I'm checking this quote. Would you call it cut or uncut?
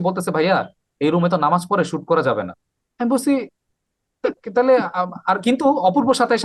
uncut